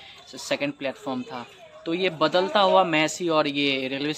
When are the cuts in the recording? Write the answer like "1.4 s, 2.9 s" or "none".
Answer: none